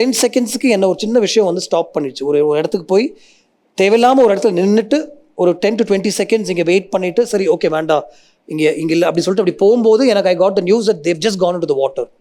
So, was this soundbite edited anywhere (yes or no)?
no